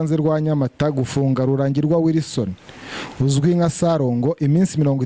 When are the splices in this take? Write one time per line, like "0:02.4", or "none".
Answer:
none